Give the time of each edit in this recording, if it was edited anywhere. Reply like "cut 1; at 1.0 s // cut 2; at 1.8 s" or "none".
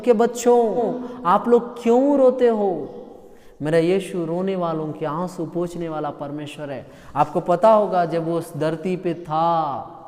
cut 1; at 1.0 s